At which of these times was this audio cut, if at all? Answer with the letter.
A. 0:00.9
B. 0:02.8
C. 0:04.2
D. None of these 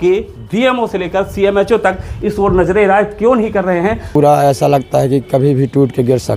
C